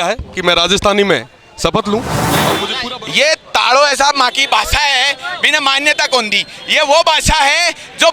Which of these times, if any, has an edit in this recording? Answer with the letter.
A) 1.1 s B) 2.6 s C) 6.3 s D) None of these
B